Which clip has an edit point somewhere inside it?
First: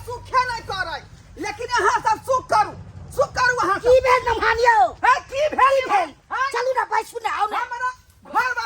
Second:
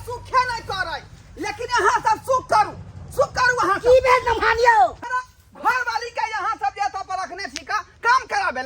second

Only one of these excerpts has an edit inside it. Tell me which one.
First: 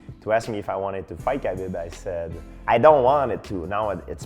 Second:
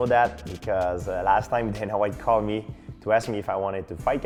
first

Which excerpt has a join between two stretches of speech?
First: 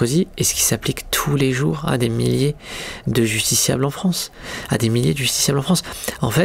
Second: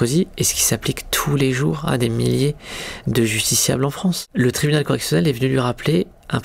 second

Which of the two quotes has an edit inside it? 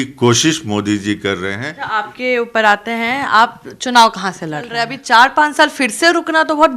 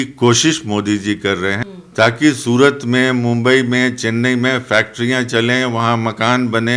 first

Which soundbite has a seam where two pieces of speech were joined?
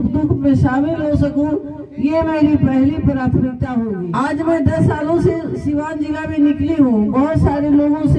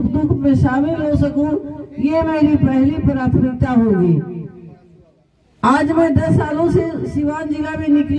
first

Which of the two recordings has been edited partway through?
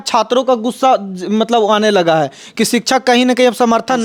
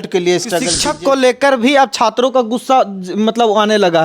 second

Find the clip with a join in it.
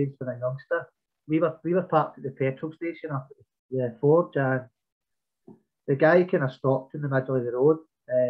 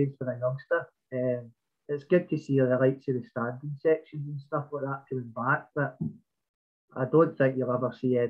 first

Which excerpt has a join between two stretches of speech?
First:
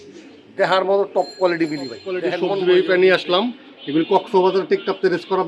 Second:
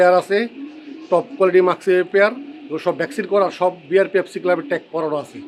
first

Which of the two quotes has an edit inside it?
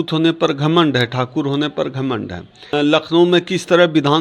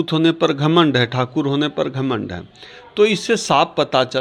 first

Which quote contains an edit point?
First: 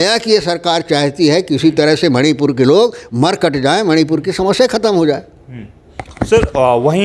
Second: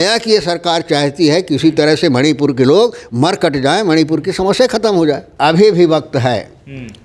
second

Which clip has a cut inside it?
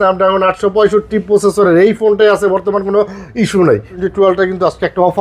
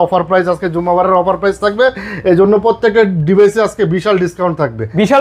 first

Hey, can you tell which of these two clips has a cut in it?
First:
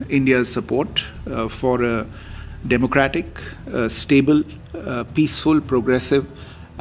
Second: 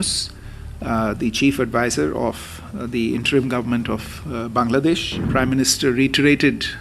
second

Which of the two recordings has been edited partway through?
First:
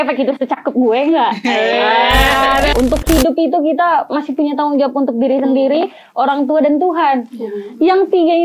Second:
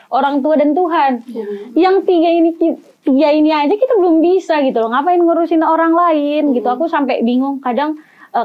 first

